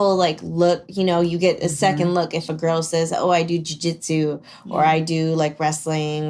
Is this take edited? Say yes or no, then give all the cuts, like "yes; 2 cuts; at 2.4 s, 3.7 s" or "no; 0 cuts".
no; 0 cuts